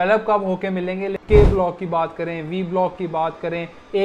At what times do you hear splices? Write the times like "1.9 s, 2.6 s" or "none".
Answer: 1.2 s